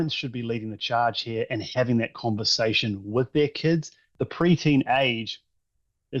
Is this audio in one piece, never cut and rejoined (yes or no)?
no